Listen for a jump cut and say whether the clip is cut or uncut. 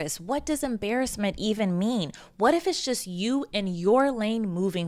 uncut